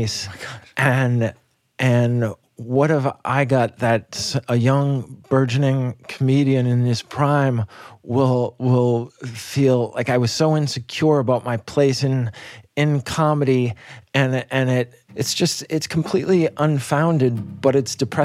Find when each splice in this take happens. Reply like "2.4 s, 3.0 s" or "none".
15.0 s